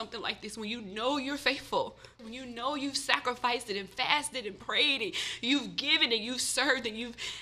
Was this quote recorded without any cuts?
no; 1 cut; at 2.2 s

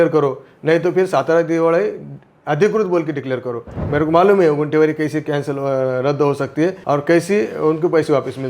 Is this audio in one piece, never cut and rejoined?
no; 2 cuts; at 3.8 s, 6.8 s

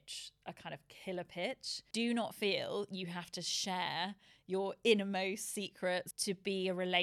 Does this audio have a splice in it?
yes; 2 cuts; at 1.9 s, 6.1 s

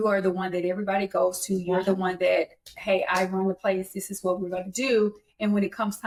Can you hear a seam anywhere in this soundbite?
no; 0 cuts

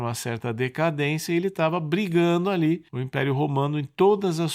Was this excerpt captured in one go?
no; 1 cut; at 3.0 s

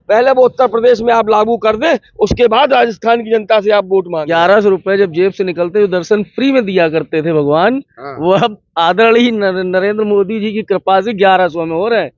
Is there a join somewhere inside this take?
yes; 1 cut; at 4.2 s

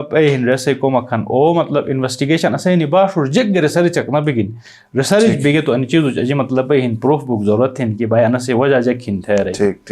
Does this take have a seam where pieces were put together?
no; 0 cuts

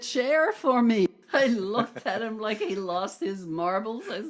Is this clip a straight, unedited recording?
no; 1 cut; at 1.1 s

